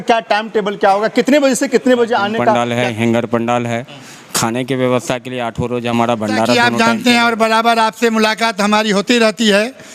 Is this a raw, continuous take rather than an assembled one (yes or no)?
no